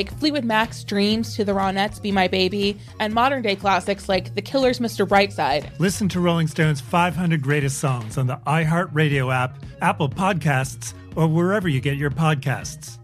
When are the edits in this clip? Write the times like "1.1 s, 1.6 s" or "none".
none